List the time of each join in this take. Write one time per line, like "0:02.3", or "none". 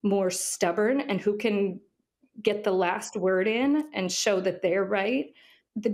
none